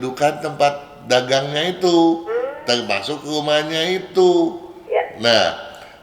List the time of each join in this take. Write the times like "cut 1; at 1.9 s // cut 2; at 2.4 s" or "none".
none